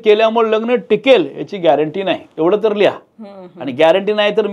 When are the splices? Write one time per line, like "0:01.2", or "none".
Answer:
none

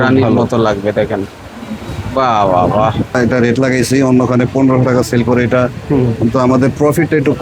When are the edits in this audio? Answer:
0:03.1

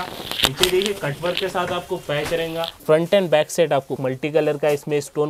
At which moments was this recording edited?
0:02.8
0:04.0

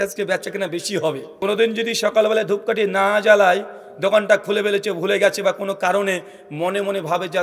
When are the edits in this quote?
0:01.3

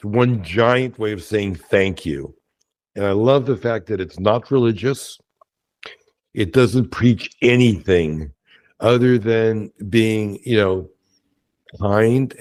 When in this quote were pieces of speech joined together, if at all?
none

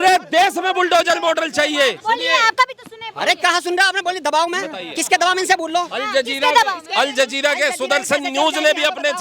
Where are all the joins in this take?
0:02.0

